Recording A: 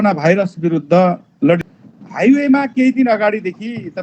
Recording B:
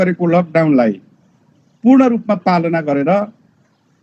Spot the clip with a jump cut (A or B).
A